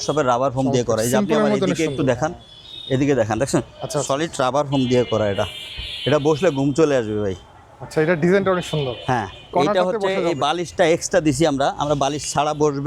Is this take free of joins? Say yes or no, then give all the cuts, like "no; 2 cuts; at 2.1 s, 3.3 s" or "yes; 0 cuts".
yes; 0 cuts